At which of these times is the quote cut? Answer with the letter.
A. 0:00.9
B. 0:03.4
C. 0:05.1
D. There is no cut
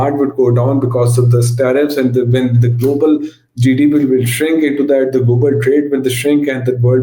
D